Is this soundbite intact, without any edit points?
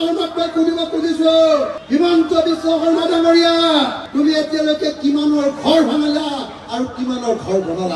yes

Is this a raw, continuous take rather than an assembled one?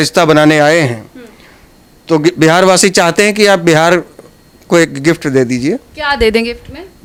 yes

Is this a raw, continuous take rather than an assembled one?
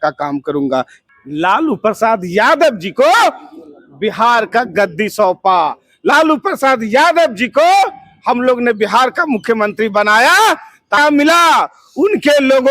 no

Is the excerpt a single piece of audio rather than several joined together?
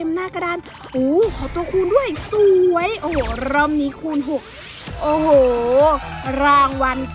yes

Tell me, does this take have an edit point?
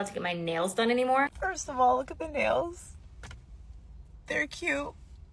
yes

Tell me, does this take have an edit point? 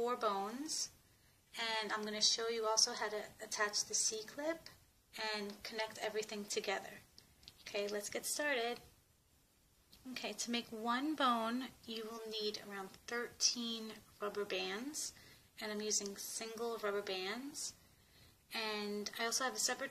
no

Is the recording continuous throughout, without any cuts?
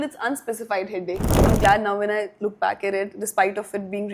no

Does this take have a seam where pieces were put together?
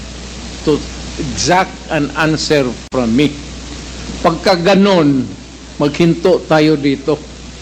no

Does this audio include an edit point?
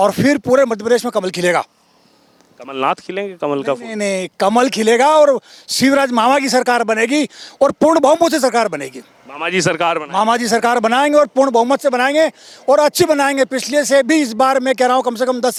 no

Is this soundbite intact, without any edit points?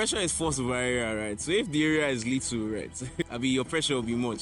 yes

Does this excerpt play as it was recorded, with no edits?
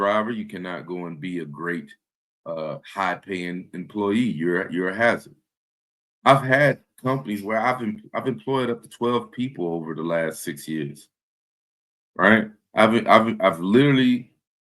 yes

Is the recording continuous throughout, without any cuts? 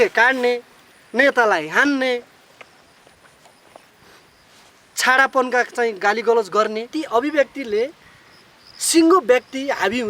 no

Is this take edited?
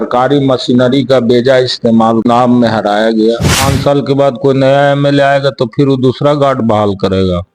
yes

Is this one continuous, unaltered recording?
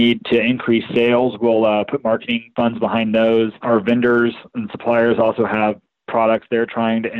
no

